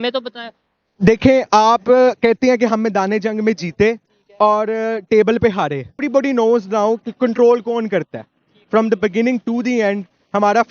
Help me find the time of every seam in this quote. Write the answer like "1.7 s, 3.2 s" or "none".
6.0 s